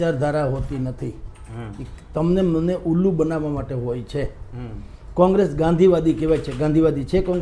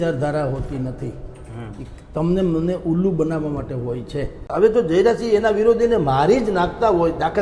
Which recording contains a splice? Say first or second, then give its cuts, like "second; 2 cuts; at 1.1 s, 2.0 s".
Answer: second; 1 cut; at 4.5 s